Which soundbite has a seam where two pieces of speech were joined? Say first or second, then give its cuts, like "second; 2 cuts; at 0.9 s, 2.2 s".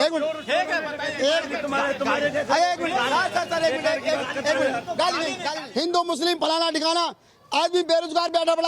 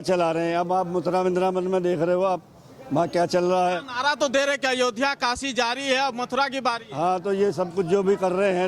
first; 1 cut; at 5.5 s